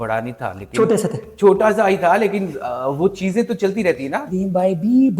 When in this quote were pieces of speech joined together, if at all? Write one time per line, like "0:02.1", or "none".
0:04.2